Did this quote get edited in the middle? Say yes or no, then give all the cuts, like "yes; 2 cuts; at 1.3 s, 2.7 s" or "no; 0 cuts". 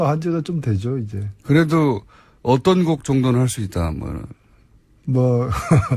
no; 0 cuts